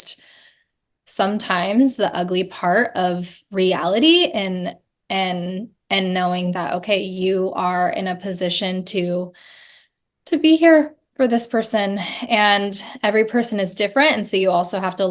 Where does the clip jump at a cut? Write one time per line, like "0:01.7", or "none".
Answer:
none